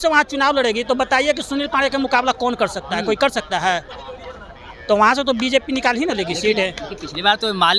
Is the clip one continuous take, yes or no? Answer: yes